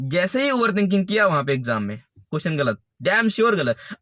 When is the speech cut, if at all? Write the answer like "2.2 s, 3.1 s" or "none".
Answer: none